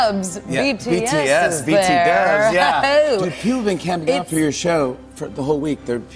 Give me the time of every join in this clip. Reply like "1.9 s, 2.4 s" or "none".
none